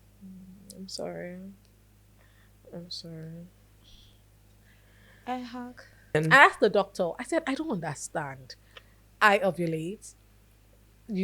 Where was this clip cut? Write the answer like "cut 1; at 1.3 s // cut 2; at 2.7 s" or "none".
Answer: cut 1; at 6.2 s